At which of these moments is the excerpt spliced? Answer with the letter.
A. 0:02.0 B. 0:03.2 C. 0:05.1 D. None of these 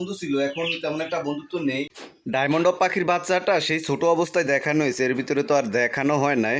A